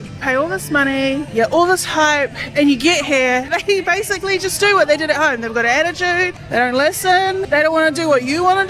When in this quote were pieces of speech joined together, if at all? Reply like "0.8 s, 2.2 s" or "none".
1.3 s, 3.5 s, 6.4 s, 7.5 s